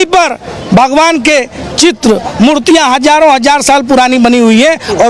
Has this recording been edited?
no; 0 cuts

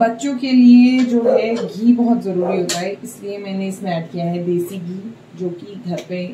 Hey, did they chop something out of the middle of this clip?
no; 0 cuts

